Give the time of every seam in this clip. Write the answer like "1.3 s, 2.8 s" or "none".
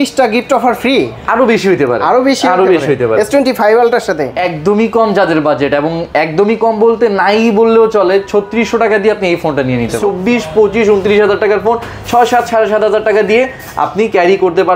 4.3 s, 10.0 s